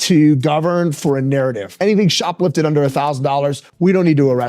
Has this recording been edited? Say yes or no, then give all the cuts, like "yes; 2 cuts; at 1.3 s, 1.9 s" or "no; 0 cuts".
yes; 1 cut; at 1.7 s